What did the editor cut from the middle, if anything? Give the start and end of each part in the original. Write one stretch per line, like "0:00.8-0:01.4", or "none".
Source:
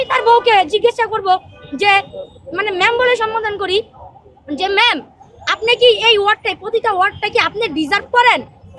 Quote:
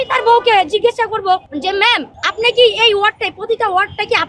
0:01.5-0:04.4
0:05.1-0:05.4